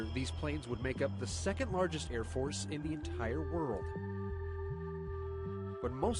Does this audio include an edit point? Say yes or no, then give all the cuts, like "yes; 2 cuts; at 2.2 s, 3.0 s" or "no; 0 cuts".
no; 0 cuts